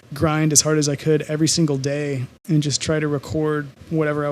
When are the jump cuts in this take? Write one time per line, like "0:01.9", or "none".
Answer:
0:02.3